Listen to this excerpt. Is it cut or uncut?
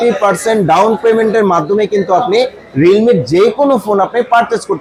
uncut